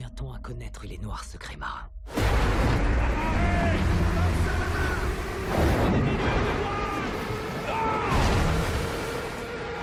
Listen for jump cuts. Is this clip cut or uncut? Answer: uncut